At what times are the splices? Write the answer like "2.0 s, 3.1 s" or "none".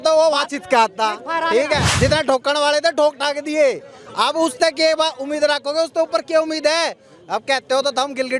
1.9 s